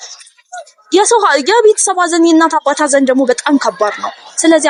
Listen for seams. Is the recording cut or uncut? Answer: uncut